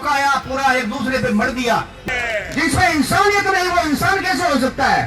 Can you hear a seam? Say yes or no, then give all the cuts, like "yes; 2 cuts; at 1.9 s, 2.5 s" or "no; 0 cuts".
yes; 1 cut; at 2.1 s